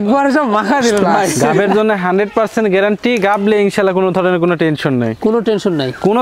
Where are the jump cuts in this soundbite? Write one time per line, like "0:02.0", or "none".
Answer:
0:01.4